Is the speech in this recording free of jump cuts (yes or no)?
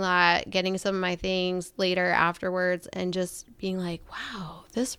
yes